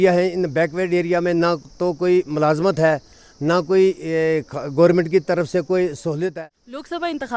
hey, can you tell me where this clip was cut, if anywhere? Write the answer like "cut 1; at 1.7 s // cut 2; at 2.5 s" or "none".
cut 1; at 6.3 s